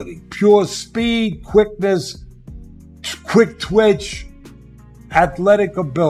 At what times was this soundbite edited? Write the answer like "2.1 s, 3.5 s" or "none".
none